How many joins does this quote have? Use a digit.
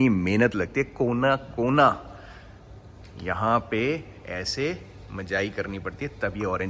0